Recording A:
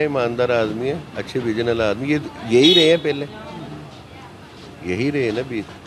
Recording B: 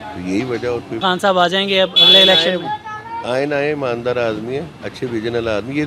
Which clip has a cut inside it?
B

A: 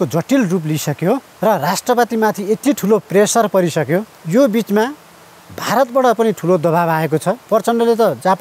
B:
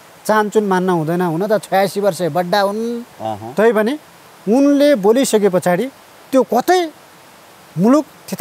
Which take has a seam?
A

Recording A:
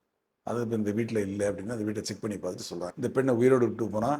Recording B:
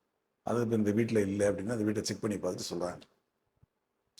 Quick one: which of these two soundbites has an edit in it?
A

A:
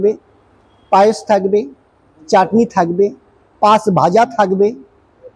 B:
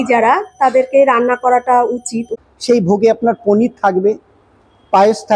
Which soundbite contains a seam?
B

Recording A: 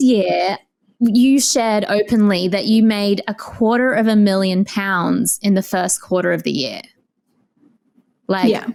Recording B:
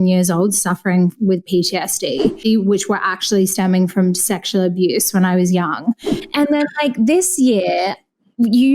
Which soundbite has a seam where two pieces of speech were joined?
B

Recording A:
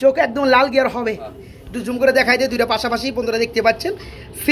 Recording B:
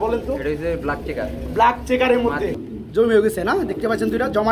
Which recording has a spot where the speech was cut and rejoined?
B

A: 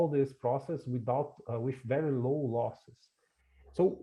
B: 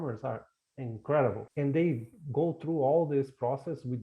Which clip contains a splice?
B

